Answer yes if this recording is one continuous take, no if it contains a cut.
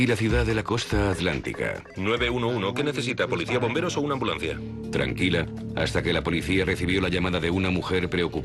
no